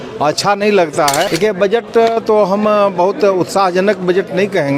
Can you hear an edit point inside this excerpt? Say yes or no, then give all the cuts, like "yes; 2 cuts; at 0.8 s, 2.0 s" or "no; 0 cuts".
yes; 1 cut; at 1.3 s